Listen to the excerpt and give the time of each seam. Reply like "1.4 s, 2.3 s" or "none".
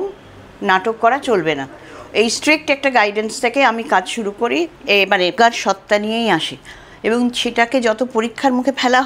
5.3 s